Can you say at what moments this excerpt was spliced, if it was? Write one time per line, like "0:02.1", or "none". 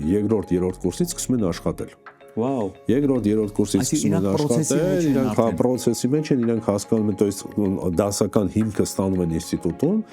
none